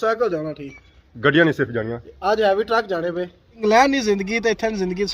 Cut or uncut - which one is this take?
cut